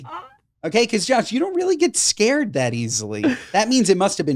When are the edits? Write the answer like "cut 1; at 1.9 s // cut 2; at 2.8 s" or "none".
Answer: cut 1; at 3.4 s